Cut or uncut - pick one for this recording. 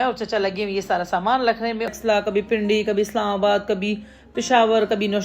cut